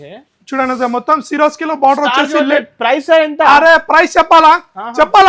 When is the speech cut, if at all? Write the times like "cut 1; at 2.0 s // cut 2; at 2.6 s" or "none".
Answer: none